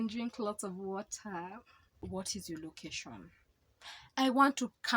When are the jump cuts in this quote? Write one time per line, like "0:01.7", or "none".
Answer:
0:01.9